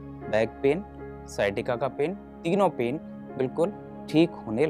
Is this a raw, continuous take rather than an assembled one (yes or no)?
yes